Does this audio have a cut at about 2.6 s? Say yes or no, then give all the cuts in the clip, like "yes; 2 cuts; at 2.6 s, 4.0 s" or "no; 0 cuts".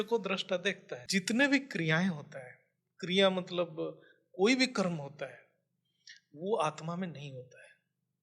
no; 1 cut; at 0.9 s